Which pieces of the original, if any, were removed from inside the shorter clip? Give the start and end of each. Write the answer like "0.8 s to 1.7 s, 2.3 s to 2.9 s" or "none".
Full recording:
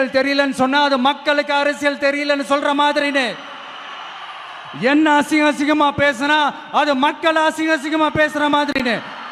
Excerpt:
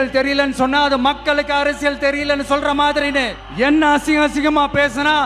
3.4 s to 4.6 s